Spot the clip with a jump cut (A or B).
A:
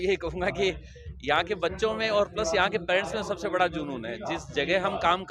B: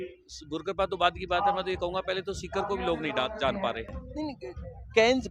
B